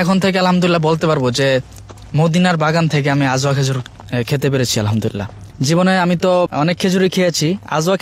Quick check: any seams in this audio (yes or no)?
yes